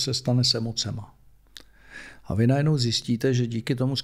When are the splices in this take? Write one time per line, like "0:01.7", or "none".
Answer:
none

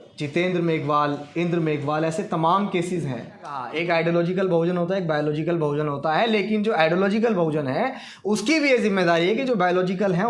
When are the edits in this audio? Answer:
0:03.7

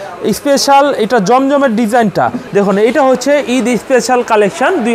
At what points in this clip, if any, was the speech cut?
0:02.4

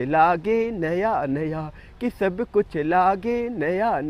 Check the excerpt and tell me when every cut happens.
none

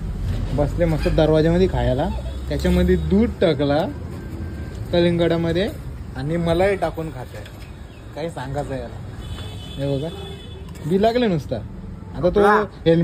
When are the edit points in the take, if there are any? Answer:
none

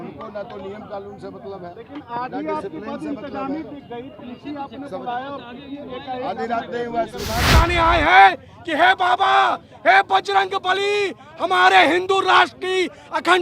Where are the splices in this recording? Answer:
0:07.5

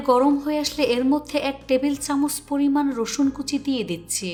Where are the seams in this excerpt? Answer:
none

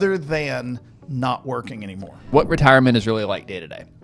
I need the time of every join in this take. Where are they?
0:02.3

